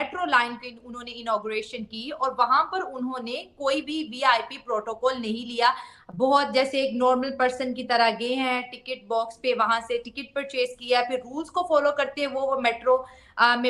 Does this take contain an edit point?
no; 0 cuts

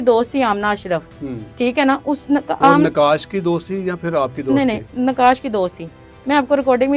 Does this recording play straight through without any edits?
yes; 0 cuts

